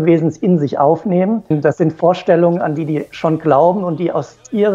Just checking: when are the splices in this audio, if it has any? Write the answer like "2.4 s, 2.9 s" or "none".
1.5 s